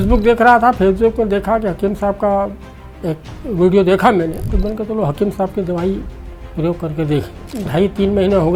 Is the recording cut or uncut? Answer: cut